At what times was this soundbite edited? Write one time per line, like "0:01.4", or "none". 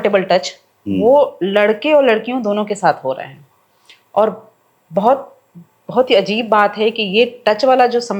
none